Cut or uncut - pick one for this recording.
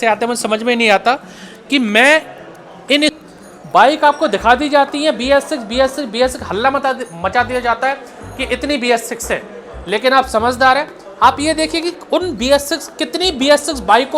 cut